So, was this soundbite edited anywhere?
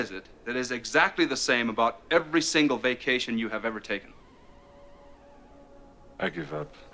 no; 0 cuts

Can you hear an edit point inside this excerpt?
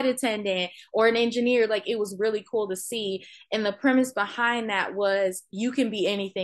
no; 0 cuts

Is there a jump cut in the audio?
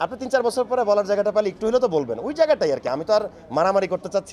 no; 0 cuts

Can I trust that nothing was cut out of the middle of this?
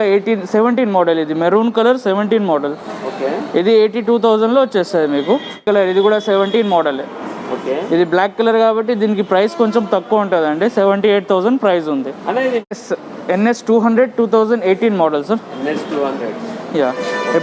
no; 2 cuts; at 5.6 s, 12.7 s

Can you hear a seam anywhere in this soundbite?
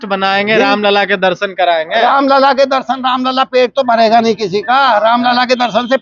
no; 0 cuts

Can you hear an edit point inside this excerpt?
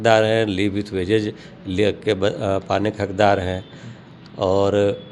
no; 0 cuts

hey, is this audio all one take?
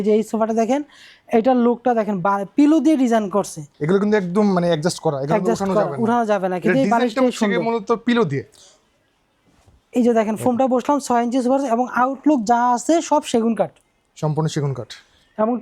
yes; 0 cuts

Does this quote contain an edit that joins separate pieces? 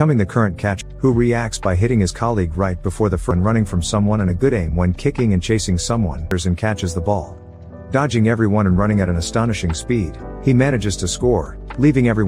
yes; 3 cuts; at 0.9 s, 3.3 s, 6.3 s

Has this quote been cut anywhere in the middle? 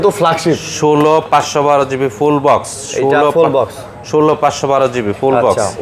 no; 0 cuts

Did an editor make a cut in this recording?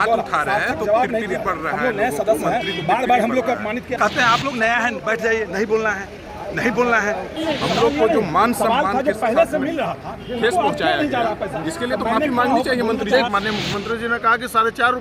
yes; 3 cuts; at 4.0 s, 7.4 s, 13.3 s

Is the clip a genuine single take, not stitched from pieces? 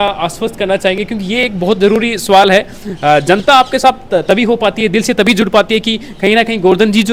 yes; 0 cuts

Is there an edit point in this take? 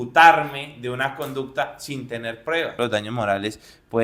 yes; 1 cut; at 2.7 s

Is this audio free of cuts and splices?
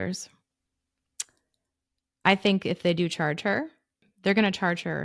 no; 1 cut; at 4.1 s

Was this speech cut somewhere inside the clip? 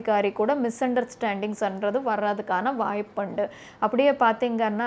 no; 0 cuts

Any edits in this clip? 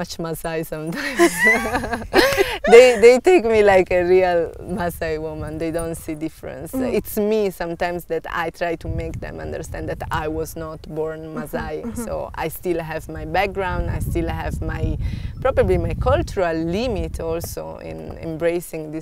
no; 0 cuts

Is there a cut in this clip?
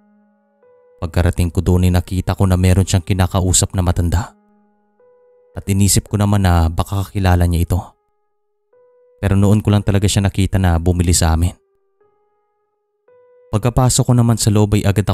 no; 0 cuts

